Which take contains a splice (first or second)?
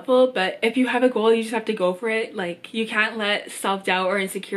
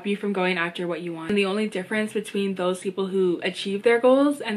second